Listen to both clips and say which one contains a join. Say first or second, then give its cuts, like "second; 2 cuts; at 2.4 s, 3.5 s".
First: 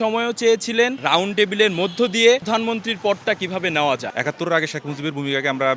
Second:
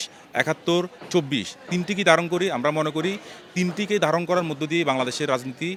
first; 3 cuts; at 1.0 s, 2.4 s, 4.1 s